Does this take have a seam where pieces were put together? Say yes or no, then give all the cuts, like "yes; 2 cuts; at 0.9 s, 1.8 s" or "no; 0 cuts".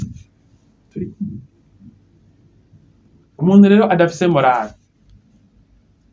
yes; 1 cut; at 3.3 s